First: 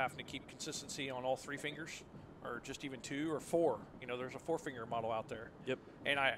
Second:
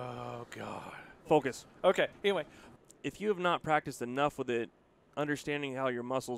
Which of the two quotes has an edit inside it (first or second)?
second